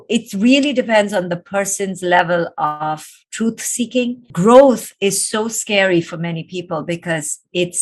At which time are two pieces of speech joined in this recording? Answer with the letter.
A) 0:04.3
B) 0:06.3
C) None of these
A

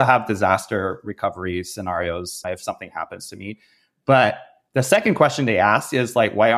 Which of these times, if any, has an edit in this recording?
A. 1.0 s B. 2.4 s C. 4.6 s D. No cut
B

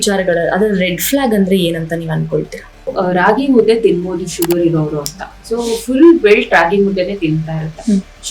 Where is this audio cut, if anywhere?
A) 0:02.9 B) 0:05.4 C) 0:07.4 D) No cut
A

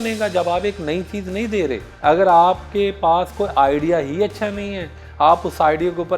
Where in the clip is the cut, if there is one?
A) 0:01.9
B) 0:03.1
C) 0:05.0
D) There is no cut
A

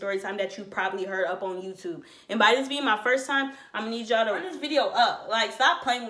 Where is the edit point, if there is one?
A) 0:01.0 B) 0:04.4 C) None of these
B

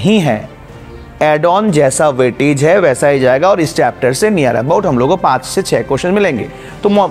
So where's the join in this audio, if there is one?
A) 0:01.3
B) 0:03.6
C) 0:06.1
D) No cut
D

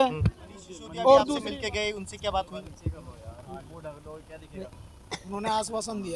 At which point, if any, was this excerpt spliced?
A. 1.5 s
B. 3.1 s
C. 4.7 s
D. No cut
A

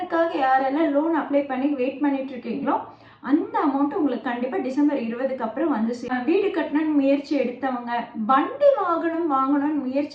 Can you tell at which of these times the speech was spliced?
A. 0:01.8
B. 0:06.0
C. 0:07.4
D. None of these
B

